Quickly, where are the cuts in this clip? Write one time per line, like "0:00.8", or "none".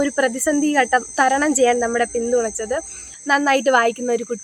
0:03.0

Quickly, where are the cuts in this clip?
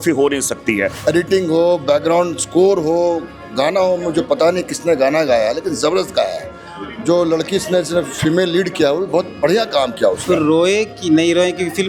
0:00.9
0:10.2

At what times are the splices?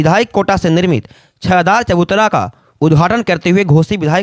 none

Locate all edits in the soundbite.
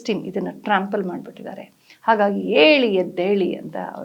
none

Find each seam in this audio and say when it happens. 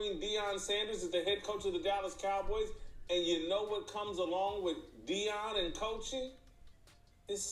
none

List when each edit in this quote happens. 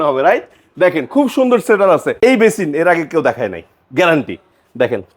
0:02.1

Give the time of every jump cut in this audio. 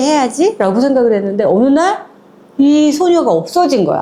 none

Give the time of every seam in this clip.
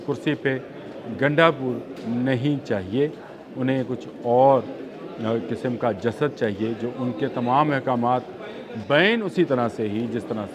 none

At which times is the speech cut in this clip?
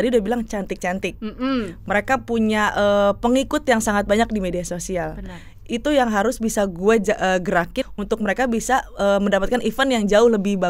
0:07.8

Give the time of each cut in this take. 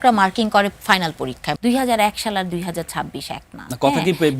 0:01.5

